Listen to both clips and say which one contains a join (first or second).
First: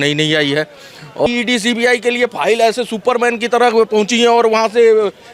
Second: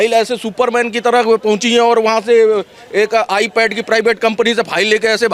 first